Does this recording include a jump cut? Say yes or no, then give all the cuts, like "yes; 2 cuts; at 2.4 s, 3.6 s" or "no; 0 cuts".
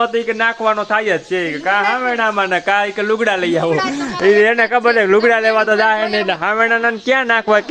no; 0 cuts